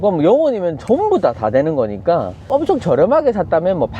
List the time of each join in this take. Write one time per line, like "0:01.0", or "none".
0:02.4